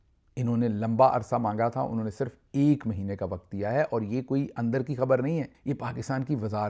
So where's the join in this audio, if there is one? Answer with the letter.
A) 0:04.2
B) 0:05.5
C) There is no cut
B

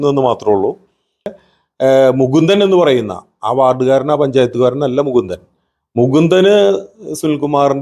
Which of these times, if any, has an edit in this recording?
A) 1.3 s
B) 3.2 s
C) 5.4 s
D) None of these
A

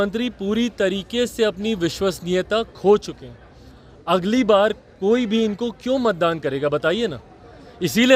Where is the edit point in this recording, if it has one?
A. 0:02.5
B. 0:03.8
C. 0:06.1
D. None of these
D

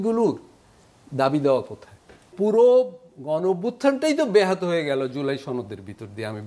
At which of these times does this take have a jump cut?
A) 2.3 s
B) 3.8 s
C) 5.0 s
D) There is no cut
A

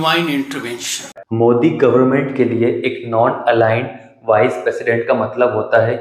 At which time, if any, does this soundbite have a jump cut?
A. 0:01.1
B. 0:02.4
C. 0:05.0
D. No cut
A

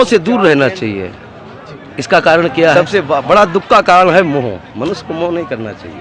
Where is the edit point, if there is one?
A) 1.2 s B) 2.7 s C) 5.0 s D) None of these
B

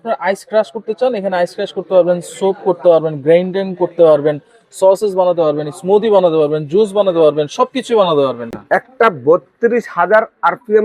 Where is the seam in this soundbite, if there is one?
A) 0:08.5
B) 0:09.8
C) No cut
A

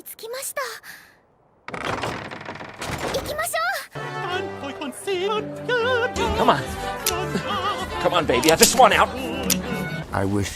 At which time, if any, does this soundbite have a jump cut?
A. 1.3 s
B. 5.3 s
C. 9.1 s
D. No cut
B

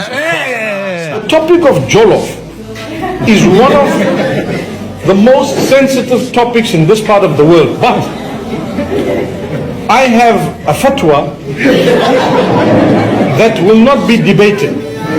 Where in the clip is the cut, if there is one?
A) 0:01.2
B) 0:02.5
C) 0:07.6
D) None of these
A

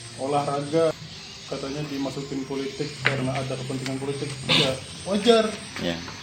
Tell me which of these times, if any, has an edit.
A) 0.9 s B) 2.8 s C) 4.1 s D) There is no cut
A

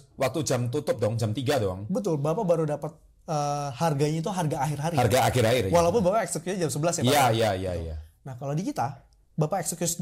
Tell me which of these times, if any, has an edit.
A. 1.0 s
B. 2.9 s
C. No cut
C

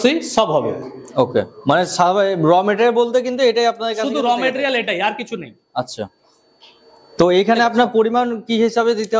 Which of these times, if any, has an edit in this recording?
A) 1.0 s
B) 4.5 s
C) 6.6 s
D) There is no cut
D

